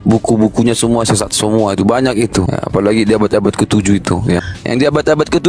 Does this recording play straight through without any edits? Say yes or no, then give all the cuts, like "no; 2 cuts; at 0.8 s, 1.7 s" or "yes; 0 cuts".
no; 2 cuts; at 2.5 s, 4.5 s